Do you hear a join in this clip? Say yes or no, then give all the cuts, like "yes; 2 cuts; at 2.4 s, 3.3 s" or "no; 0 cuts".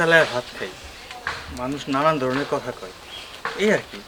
no; 0 cuts